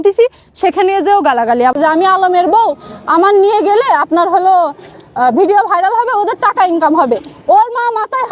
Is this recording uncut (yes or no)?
no